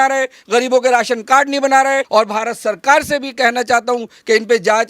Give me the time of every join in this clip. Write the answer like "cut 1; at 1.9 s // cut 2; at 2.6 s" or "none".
cut 1; at 2.1 s